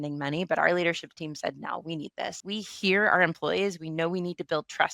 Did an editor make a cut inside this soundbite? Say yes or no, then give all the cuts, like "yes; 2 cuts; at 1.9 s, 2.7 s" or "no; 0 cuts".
yes; 1 cut; at 2.4 s